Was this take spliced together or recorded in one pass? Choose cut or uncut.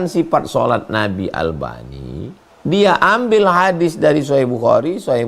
cut